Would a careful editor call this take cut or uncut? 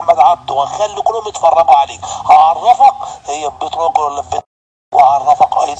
uncut